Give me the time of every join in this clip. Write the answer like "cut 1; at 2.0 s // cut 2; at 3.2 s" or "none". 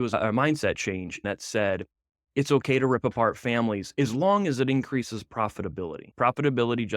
cut 1; at 1.2 s // cut 2; at 6.0 s